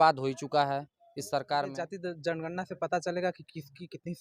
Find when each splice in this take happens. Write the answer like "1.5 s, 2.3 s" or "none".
1.9 s